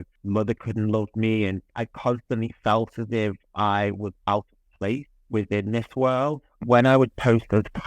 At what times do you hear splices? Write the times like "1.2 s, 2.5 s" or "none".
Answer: 6.5 s